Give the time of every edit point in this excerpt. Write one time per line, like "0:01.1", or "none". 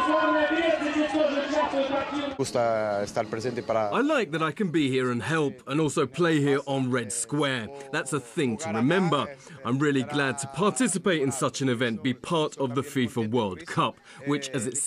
none